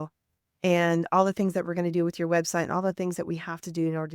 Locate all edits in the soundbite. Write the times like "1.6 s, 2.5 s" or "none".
none

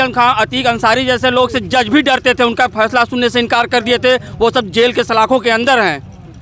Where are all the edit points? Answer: none

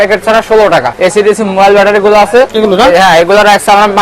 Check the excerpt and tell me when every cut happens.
0.9 s, 2.5 s

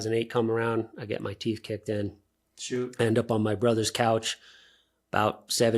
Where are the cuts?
none

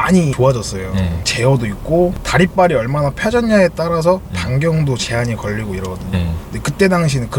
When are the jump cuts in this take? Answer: none

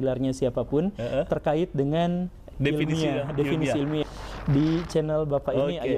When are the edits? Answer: 4.0 s

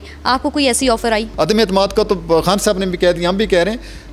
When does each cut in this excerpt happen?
1.3 s

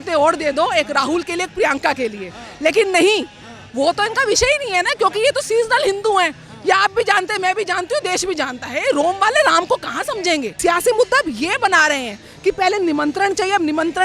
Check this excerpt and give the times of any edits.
10.5 s

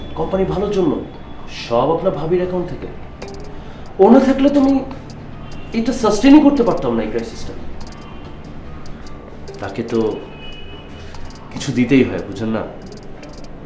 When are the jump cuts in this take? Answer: none

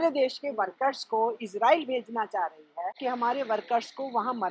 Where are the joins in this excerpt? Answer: 3.0 s

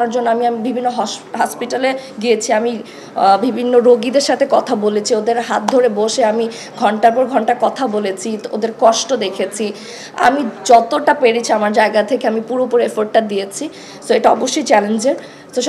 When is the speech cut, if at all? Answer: none

